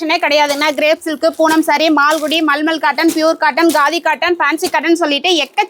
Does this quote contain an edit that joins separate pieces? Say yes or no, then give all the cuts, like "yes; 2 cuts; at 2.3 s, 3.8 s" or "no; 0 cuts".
no; 0 cuts